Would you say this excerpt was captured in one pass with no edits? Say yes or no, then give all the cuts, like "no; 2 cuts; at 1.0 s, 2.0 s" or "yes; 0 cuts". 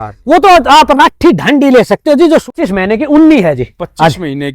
no; 1 cut; at 2.5 s